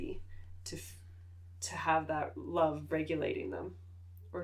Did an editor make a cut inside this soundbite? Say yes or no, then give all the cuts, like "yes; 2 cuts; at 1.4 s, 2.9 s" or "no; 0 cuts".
no; 0 cuts